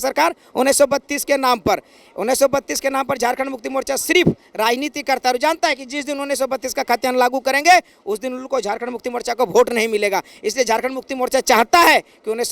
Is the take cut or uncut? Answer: uncut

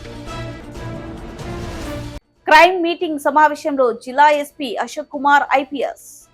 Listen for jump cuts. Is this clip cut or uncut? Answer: uncut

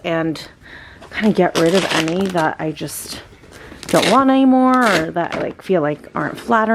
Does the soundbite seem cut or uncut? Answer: uncut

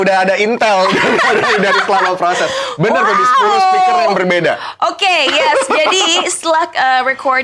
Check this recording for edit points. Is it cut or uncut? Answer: uncut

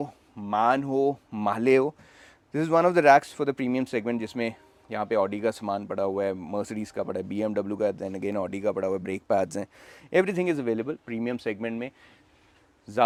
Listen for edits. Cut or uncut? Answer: uncut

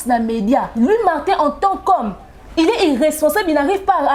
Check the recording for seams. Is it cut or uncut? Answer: uncut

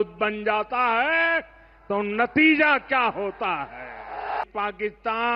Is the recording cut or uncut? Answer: cut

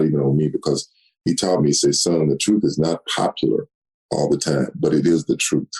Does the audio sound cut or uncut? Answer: cut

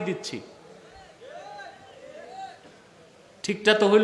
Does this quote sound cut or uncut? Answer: uncut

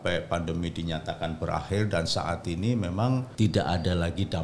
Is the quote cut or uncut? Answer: cut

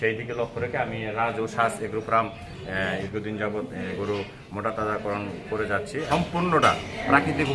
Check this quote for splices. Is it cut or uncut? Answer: cut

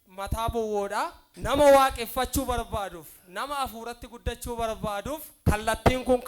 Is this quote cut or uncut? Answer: cut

